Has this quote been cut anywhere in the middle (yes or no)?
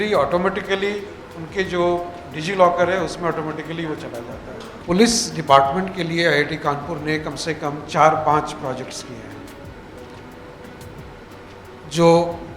yes